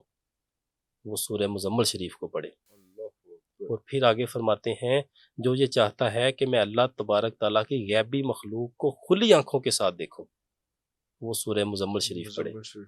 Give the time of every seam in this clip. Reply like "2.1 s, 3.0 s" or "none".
none